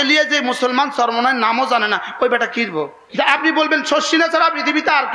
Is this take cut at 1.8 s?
no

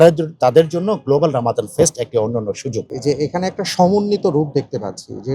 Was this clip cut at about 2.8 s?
yes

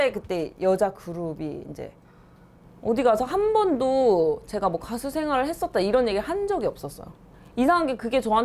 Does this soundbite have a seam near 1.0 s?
no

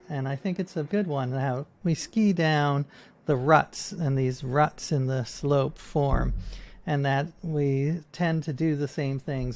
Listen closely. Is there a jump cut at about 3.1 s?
no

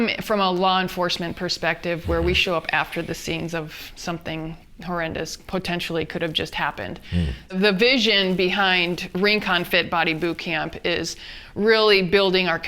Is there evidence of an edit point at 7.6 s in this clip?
yes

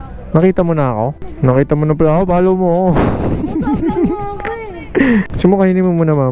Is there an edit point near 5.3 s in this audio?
yes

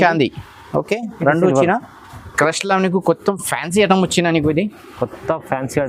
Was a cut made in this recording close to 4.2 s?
no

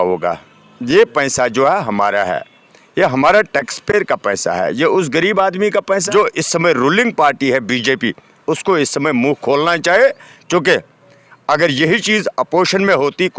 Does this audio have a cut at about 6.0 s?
yes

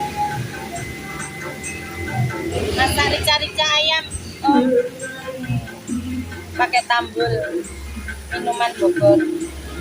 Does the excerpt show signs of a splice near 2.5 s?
yes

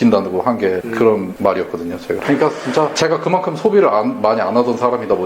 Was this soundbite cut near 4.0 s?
no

